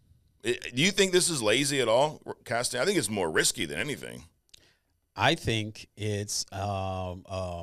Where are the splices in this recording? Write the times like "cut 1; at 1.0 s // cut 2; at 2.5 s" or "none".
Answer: none